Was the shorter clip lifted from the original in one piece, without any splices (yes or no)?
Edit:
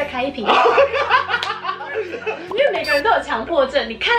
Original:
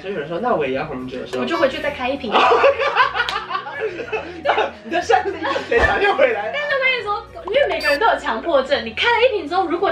no